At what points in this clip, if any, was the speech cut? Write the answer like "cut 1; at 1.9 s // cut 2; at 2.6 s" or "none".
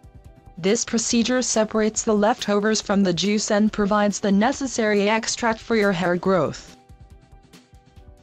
cut 1; at 5.7 s